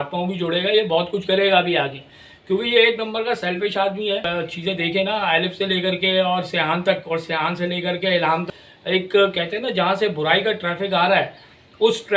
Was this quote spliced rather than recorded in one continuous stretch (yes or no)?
yes